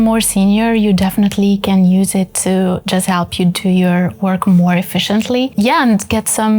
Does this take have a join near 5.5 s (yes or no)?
yes